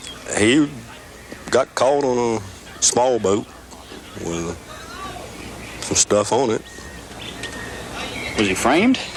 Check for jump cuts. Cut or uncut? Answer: uncut